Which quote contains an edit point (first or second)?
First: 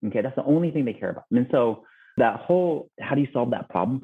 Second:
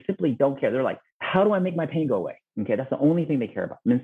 first